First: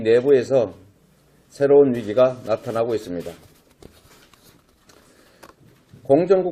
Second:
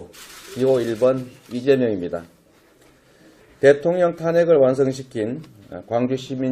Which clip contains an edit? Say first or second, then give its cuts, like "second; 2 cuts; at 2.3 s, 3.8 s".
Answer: second; 1 cut; at 3.6 s